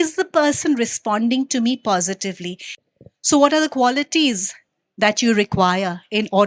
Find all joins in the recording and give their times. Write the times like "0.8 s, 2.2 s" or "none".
2.7 s